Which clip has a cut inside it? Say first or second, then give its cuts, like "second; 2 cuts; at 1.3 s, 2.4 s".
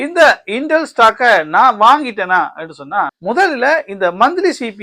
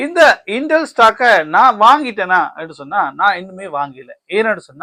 first; 1 cut; at 3.1 s